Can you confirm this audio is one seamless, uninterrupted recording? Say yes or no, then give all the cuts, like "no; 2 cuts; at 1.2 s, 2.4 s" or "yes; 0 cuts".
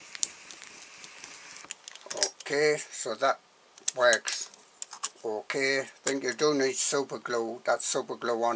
yes; 0 cuts